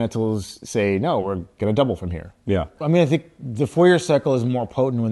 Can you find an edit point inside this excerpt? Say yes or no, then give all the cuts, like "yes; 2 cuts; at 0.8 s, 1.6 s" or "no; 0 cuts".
yes; 1 cut; at 2.7 s